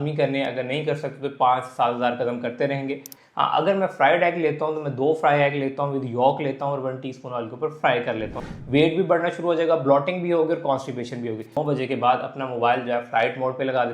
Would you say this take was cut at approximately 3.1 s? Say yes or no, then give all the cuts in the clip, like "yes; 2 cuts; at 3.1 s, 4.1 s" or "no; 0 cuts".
yes; 3 cuts; at 3.1 s, 8.6 s, 11.5 s